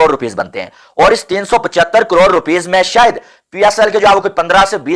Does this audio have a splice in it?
no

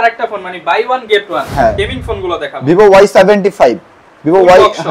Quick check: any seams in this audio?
yes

